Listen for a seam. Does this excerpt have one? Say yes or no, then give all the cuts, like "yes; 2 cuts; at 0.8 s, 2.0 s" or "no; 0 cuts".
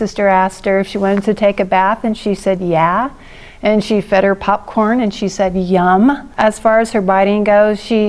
no; 0 cuts